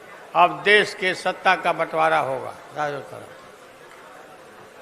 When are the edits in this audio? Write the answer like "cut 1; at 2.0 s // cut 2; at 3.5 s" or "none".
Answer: none